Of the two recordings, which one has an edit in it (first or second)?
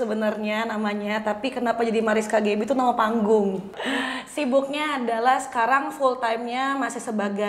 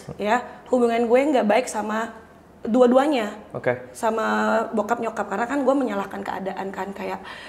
first